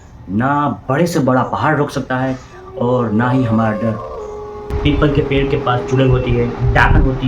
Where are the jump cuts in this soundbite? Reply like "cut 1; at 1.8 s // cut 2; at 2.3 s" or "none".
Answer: cut 1; at 4.6 s